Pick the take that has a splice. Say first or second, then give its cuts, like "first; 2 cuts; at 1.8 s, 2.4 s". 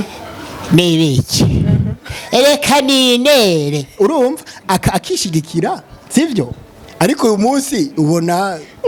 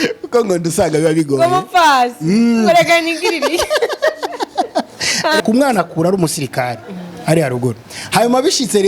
second; 1 cut; at 5.4 s